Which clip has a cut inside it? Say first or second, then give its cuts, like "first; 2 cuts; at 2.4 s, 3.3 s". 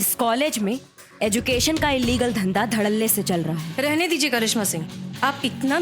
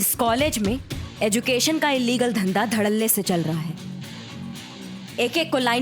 first; 1 cut; at 3.7 s